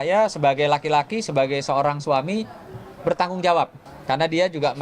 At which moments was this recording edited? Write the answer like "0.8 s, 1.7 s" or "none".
3.9 s